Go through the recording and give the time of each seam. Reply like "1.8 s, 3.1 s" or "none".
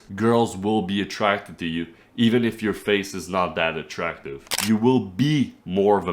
4.4 s